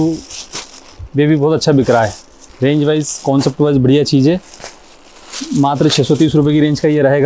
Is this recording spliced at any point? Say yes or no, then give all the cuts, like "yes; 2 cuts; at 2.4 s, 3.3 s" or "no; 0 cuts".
no; 0 cuts